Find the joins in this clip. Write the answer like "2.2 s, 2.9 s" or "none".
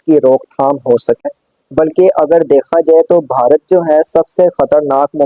1.2 s